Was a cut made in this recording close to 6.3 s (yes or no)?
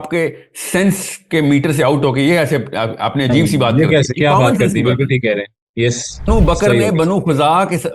yes